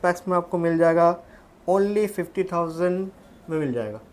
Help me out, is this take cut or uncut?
uncut